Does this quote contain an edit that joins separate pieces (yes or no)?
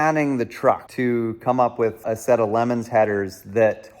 yes